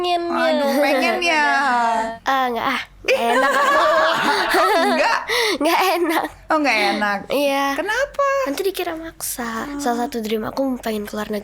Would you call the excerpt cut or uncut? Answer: cut